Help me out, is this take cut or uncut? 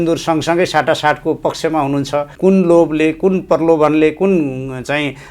cut